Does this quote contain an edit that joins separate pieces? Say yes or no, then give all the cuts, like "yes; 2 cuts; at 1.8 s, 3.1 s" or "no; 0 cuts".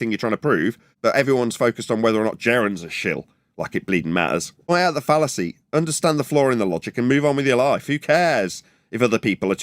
yes; 2 cuts; at 0.7 s, 4.7 s